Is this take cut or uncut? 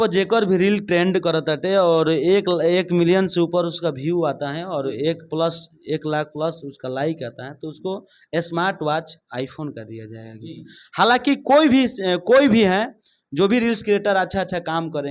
uncut